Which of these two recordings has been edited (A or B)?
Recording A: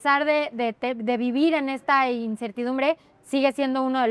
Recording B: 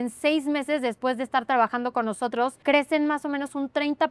B